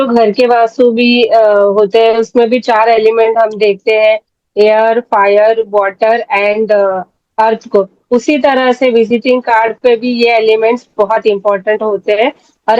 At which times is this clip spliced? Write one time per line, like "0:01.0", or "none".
none